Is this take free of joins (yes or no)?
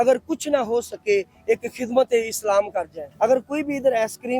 no